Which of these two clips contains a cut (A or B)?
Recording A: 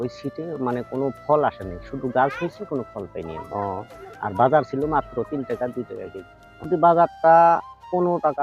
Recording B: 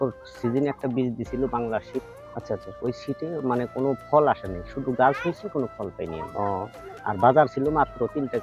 A